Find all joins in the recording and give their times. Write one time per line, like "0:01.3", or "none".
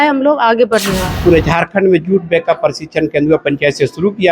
0:01.1